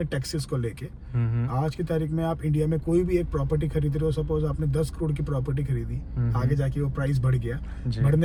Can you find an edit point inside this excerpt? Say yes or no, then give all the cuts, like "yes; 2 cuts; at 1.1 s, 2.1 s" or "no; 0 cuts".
no; 0 cuts